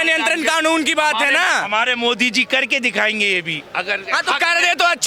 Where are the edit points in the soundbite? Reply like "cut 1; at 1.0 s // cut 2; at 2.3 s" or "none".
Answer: none